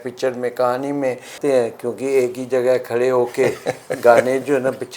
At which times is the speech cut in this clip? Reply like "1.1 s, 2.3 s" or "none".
1.3 s

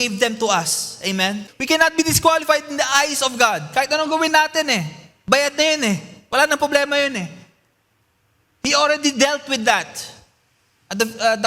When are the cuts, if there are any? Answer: 1.5 s

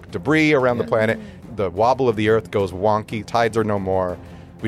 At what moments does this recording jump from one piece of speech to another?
1.4 s, 3.2 s

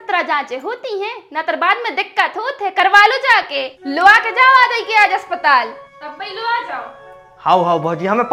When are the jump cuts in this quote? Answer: none

